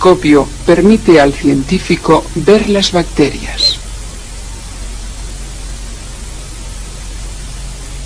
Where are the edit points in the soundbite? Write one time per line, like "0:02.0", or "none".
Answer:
0:01.6